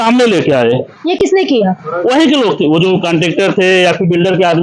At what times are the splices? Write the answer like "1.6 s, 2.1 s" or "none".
none